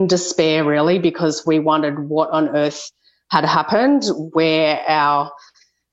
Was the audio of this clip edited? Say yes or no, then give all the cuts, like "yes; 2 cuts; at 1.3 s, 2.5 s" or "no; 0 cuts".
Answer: no; 0 cuts